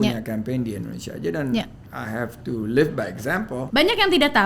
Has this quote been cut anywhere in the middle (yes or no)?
yes